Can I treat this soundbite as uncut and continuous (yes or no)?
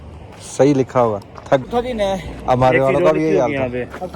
no